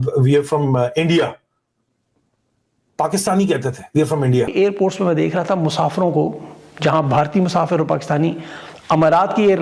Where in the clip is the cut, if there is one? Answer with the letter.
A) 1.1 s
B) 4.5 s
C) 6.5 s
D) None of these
B